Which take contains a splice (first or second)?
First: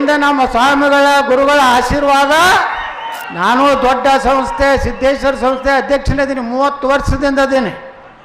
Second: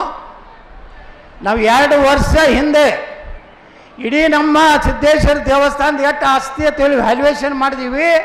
first